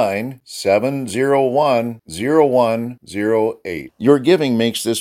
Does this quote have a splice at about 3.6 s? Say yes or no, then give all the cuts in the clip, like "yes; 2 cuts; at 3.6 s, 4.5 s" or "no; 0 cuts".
no; 0 cuts